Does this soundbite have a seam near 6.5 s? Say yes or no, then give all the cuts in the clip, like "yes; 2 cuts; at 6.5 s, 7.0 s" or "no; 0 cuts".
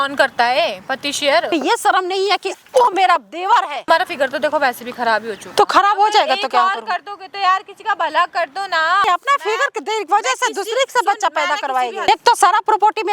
no; 4 cuts; at 1.5 s, 3.8 s, 9.0 s, 12.0 s